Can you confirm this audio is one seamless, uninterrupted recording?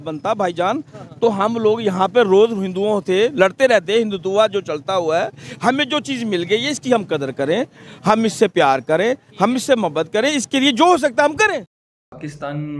yes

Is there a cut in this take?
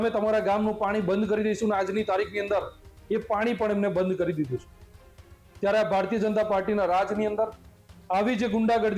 no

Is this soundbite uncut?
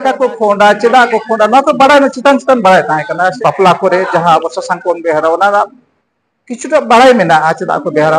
no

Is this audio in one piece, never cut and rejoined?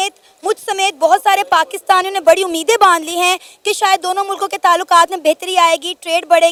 yes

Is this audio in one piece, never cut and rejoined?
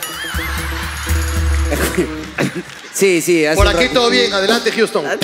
yes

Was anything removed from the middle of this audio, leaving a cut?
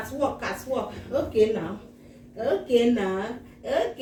no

